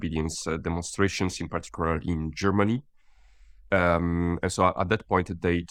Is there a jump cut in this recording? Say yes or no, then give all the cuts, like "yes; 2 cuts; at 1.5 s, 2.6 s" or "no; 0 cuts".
no; 0 cuts